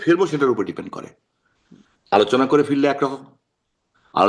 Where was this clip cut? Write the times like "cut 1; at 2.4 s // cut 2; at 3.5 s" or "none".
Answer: none

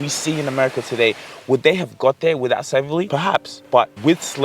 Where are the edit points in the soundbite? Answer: cut 1; at 3.4 s

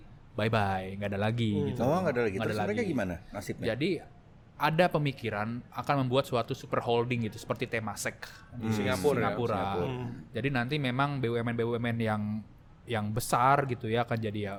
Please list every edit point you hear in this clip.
none

